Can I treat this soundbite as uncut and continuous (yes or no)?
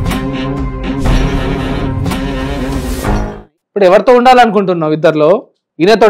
no